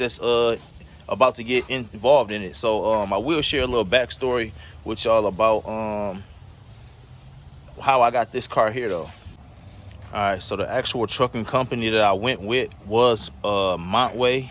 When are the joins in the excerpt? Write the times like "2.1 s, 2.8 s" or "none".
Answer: none